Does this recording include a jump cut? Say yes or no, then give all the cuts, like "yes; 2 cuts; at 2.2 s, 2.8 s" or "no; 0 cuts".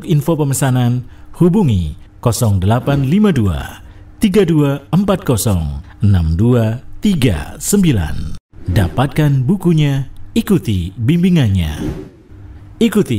yes; 1 cut; at 5.8 s